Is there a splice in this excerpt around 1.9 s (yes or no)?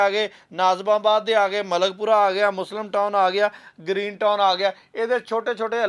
no